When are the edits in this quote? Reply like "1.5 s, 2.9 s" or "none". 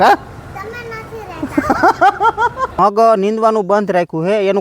2.8 s

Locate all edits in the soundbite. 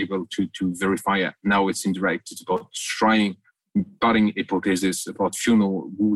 none

